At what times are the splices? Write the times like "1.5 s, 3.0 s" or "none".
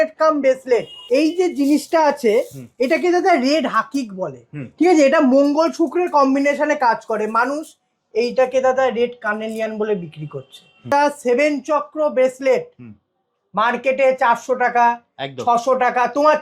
0.9 s, 10.9 s